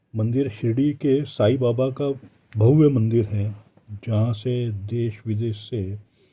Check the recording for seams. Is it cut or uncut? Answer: uncut